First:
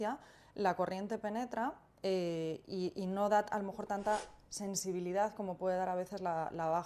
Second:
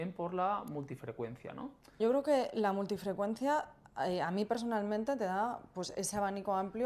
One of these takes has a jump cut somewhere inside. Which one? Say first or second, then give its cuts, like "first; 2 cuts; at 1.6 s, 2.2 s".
second; 1 cut; at 2.0 s